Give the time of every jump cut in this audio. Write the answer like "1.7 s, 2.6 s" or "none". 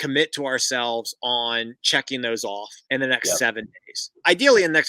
2.7 s